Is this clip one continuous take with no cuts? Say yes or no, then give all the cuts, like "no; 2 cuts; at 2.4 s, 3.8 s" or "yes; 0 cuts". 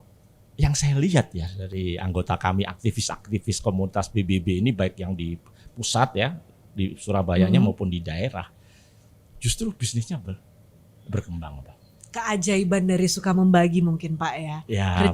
yes; 0 cuts